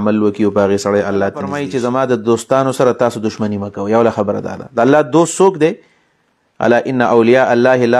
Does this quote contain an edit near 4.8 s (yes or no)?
no